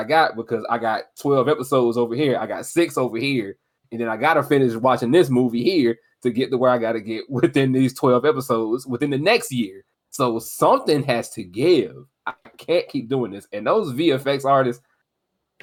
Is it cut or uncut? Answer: uncut